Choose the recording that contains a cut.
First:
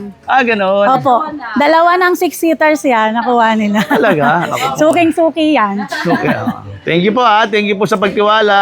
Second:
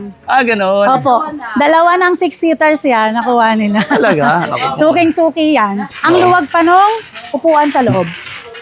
second; 1 cut; at 5.9 s

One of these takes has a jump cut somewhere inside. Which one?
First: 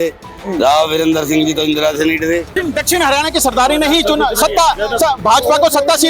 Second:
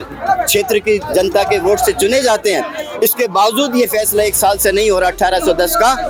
first; 1 cut; at 2.5 s

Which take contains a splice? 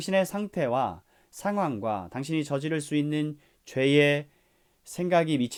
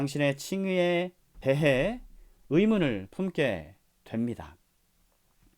second; 1 cut; at 1.2 s

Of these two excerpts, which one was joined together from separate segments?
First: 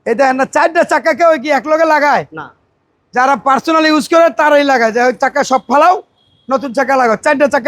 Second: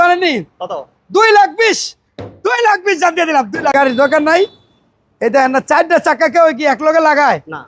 second; 1 cut; at 3.7 s

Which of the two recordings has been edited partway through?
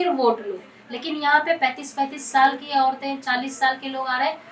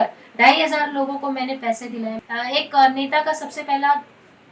second; 1 cut; at 2.2 s

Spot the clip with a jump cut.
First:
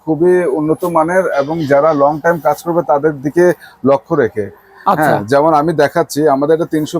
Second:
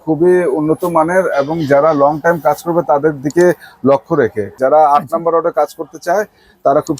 second; 1 cut; at 4.5 s

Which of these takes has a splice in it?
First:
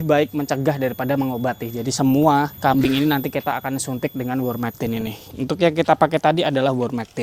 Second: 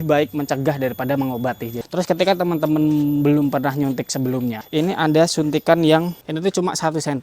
second; 3 cuts; at 1.7 s, 4.6 s, 6.2 s

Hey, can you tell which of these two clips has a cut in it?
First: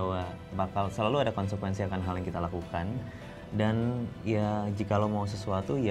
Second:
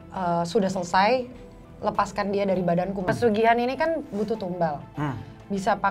second; 1 cut; at 3.1 s

